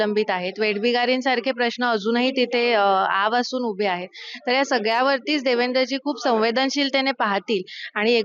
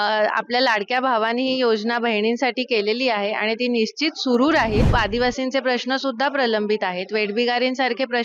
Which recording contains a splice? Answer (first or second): second